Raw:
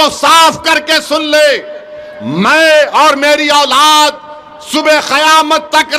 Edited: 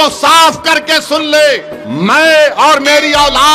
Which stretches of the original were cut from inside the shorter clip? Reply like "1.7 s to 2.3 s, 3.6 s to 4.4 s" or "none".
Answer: 1.8 s to 2.1 s